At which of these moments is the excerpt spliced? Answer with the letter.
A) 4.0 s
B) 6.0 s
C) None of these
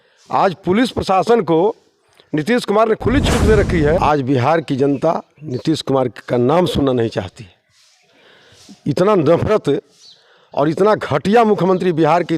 A